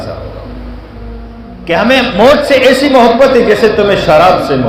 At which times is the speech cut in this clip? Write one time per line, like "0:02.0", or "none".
0:01.5